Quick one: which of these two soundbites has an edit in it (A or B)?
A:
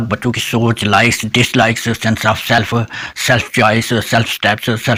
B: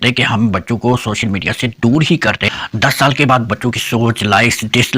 B